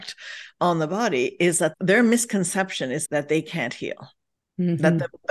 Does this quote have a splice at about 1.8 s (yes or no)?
yes